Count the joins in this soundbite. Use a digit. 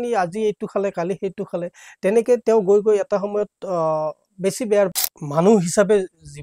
1